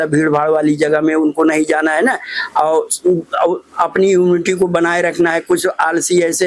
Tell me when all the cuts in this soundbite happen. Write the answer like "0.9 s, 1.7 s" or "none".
none